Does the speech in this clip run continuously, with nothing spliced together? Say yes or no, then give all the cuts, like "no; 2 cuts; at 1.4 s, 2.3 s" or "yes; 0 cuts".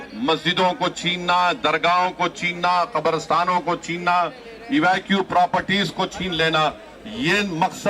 yes; 0 cuts